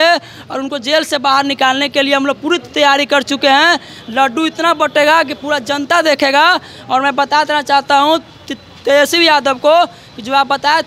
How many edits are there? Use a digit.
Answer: 0